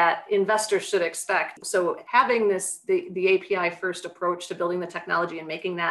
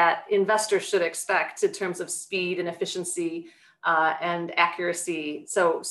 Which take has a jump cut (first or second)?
first